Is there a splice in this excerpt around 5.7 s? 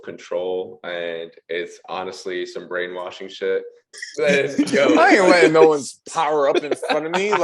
no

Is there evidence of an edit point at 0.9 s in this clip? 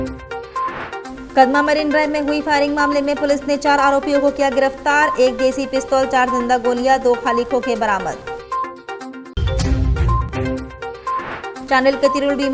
yes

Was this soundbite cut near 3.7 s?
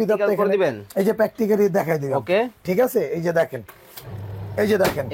yes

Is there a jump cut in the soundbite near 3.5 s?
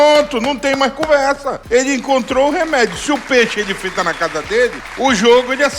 no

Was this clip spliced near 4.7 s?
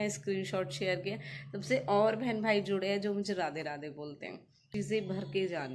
yes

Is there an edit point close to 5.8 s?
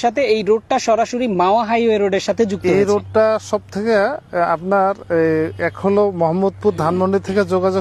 no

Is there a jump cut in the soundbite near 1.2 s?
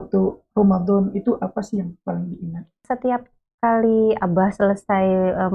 no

